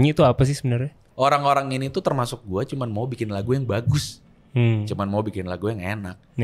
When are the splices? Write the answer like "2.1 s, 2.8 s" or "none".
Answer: 1.0 s